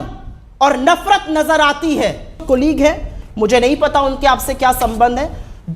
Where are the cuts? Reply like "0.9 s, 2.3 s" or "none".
2.4 s